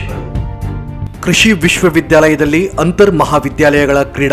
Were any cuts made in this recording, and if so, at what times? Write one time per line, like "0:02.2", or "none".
0:01.0